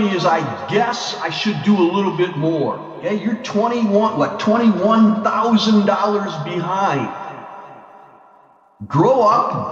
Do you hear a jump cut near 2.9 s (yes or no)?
yes